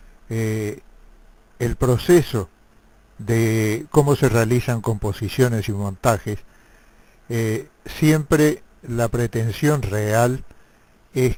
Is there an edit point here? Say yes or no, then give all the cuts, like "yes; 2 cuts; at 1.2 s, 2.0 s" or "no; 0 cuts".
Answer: no; 0 cuts